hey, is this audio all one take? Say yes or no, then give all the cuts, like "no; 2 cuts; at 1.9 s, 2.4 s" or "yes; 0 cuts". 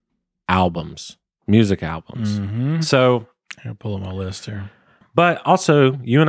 no; 1 cut; at 5.0 s